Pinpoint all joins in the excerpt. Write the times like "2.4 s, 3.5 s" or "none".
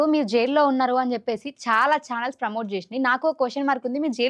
none